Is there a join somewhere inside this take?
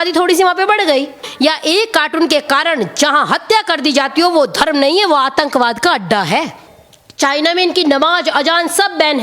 yes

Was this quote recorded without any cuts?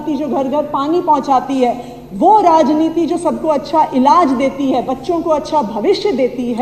yes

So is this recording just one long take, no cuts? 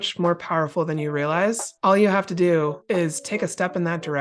no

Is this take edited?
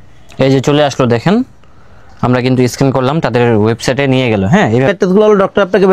yes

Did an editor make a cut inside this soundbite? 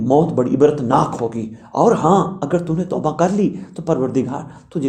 no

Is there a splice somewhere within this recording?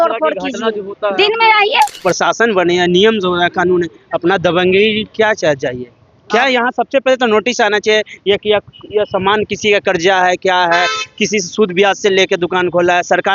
yes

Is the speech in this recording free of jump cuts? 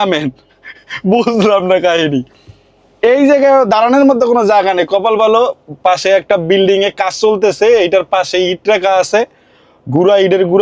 yes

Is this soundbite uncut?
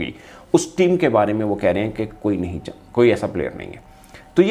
yes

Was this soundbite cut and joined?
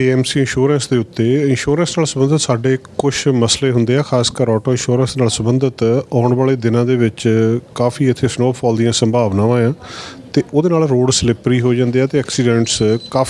no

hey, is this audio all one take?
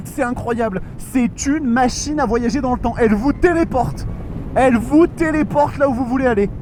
yes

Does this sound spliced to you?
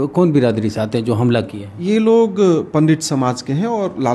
no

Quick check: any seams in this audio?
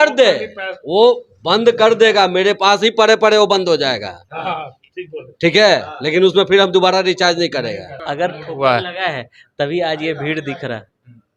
yes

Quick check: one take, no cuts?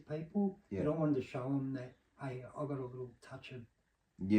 yes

